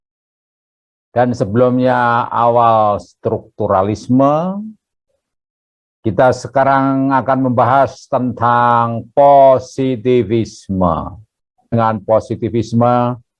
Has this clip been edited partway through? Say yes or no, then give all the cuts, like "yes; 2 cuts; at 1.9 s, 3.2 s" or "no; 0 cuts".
yes; 1 cut; at 11.7 s